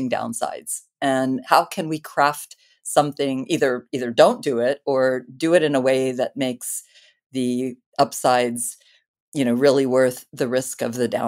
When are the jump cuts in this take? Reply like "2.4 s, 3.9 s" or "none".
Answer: 1.4 s

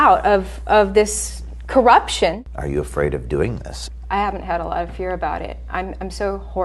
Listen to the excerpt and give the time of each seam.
2.5 s

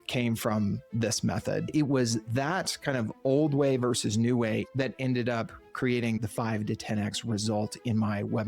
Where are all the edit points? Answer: 1.7 s, 4.7 s, 6.2 s

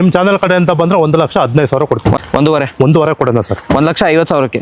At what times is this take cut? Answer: 2.1 s

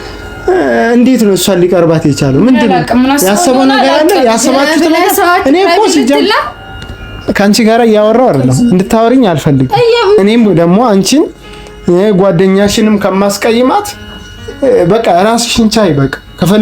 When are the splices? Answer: 10.2 s

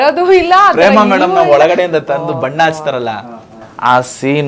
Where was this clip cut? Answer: none

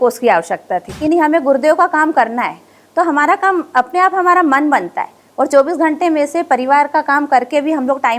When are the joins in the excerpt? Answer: 1.0 s

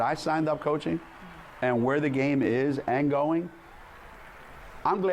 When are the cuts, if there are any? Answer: none

